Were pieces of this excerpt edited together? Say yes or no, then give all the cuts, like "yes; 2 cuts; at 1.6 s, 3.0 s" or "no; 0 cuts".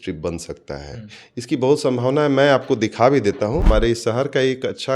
yes; 1 cut; at 3.6 s